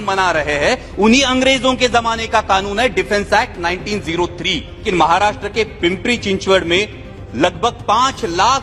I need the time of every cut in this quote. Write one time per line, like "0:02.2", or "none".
0:04.8

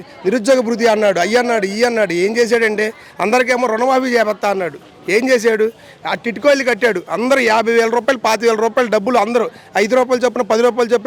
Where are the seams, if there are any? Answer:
none

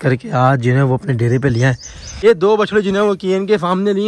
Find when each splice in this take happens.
0:02.2

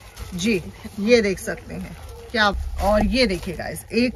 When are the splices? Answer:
0:02.6

